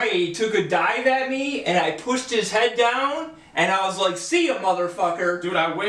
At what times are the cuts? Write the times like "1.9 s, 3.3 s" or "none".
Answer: none